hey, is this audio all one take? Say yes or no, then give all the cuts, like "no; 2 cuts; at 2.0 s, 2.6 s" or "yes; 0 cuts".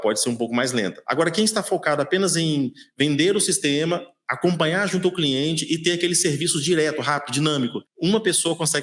no; 1 cut; at 7.8 s